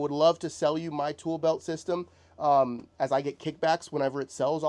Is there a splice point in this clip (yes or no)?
no